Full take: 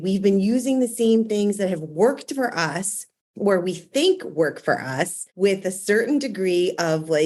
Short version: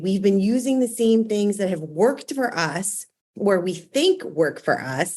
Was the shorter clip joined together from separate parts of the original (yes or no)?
no